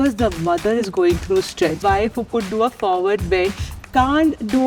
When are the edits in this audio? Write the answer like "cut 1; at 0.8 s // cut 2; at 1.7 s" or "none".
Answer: cut 1; at 1.8 s